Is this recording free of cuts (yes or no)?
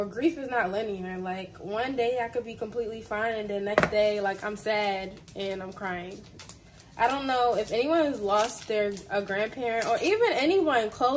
yes